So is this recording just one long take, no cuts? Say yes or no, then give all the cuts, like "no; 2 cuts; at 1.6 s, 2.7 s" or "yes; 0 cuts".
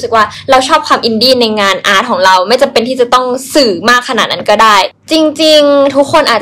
no; 1 cut; at 4.9 s